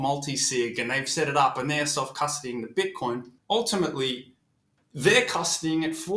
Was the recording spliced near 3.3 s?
yes; 1 cut; at 3.3 s

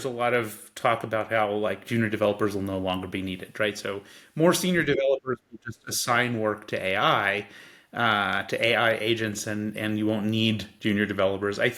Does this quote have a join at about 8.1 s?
no; 0 cuts

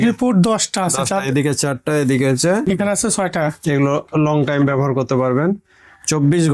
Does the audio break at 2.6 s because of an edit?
yes; 1 cut; at 2.6 s

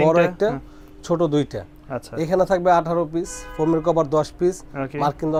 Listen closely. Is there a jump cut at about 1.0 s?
no; 0 cuts

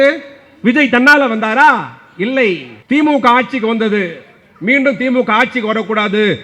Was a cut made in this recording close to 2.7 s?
yes; 1 cut; at 2.7 s

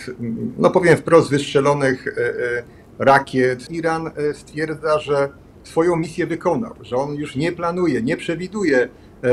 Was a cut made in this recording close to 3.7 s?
yes; 1 cut; at 3.7 s

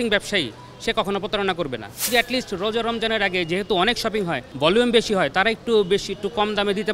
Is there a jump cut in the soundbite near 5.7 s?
no; 2 cuts; at 2.1 s, 4.4 s

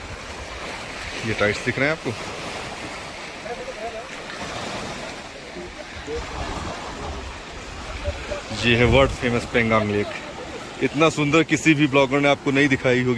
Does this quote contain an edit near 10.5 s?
no; 0 cuts

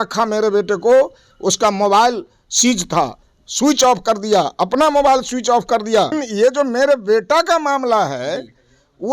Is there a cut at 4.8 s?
no; 1 cut; at 6.2 s

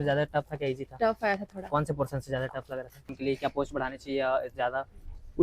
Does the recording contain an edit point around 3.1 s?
yes; 1 cut; at 3.1 s

